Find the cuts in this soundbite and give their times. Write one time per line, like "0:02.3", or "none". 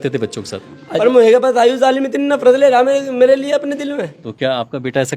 0:01.0
0:04.2